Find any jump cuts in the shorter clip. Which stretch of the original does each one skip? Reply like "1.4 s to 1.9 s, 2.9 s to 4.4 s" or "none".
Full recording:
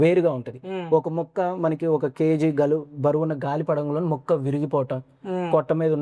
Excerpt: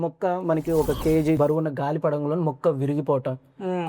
2.5 s to 3.0 s